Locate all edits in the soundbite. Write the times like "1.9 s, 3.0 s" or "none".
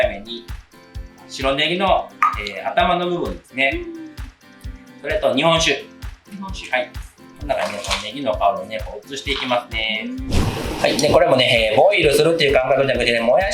10.3 s